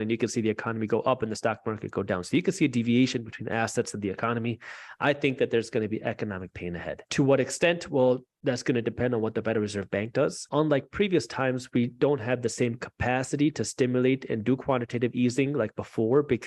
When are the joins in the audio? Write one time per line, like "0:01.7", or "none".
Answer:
0:07.0
0:10.4